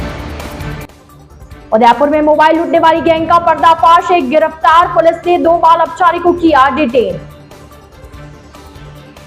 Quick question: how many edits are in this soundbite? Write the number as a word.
one